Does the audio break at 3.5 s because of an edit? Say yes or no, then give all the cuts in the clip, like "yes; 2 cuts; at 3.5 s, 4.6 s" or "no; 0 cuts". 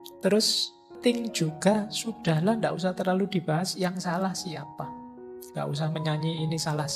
no; 2 cuts; at 0.9 s, 5.0 s